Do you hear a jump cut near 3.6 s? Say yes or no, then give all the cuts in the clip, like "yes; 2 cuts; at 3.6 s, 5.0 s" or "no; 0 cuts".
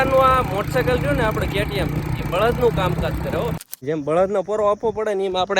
yes; 1 cut; at 3.6 s